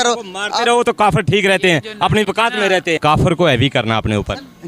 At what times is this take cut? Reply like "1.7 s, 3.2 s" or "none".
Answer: 3.0 s